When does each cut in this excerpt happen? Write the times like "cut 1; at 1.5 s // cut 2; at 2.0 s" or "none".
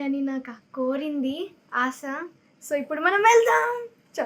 none